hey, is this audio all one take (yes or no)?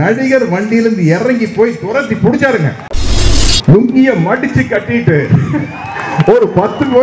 no